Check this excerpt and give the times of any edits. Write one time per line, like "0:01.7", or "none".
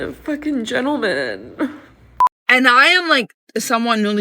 0:02.1